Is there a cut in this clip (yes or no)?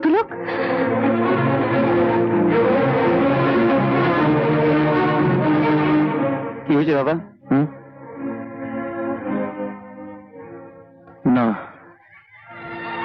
no